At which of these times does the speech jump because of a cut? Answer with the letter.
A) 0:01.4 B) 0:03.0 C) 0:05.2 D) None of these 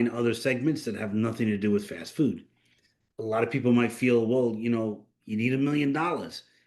B